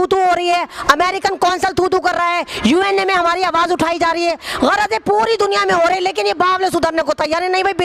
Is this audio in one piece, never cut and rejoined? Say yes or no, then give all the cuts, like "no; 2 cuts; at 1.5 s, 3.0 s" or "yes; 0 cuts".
yes; 0 cuts